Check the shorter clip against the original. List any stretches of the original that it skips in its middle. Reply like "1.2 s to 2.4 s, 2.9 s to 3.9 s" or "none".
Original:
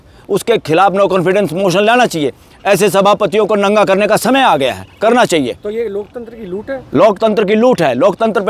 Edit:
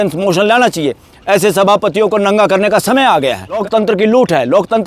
5.0 s to 7.1 s